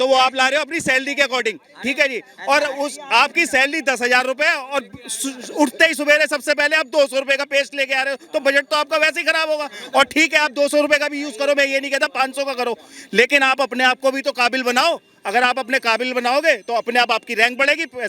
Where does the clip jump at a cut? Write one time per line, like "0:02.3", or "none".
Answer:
none